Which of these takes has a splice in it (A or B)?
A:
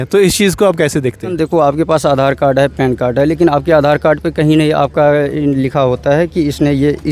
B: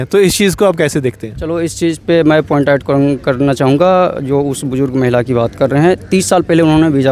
A